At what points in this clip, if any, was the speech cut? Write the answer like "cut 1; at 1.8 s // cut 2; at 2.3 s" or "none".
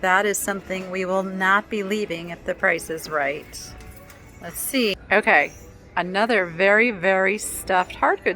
cut 1; at 5.0 s

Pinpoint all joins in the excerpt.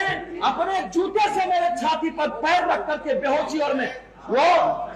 none

